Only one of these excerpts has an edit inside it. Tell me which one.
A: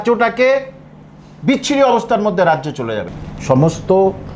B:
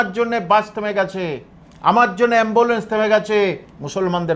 A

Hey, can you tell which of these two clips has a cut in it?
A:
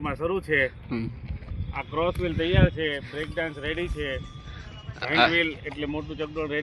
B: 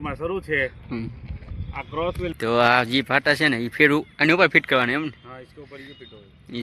B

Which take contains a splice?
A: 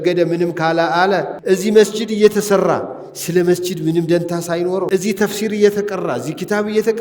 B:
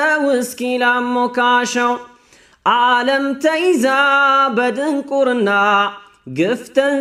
A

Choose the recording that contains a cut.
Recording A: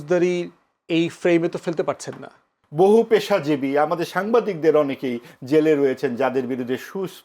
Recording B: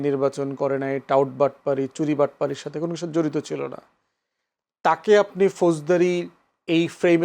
A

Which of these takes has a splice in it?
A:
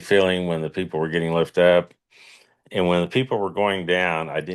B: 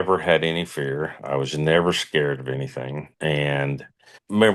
B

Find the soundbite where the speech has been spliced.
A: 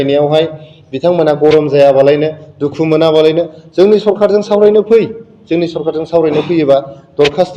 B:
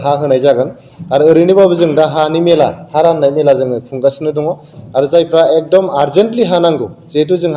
B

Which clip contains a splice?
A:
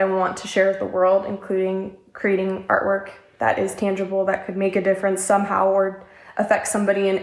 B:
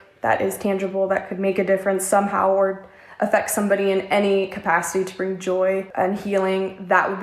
B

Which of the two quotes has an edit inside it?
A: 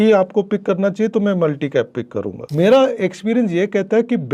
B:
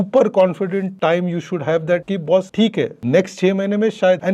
A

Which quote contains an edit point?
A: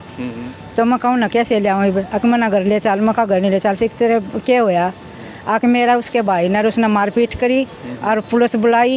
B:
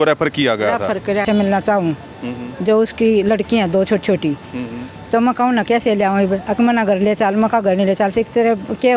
B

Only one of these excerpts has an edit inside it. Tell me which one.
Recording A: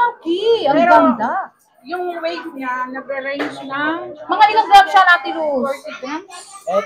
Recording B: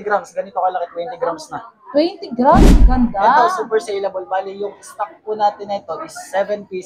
B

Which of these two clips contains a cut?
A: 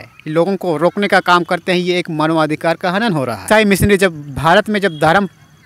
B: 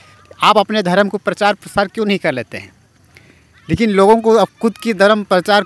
A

